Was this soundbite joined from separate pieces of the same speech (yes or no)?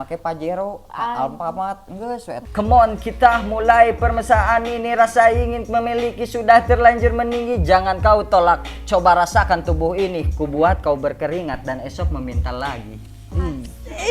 yes